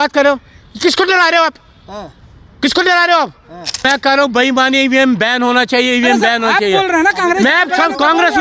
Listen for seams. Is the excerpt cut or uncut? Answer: cut